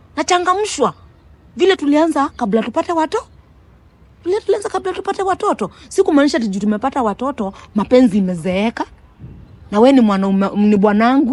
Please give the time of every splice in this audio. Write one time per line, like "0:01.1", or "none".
none